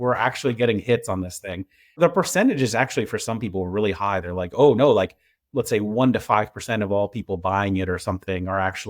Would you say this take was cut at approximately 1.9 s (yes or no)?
yes